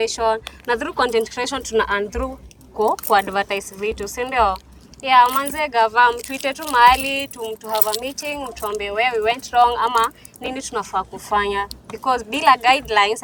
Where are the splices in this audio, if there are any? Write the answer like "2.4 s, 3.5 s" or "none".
none